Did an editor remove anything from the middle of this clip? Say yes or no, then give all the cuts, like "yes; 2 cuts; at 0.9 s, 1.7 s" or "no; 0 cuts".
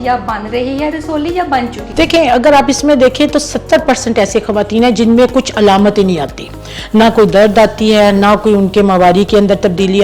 yes; 1 cut; at 1.8 s